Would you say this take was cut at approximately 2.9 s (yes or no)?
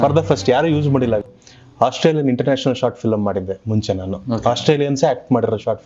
no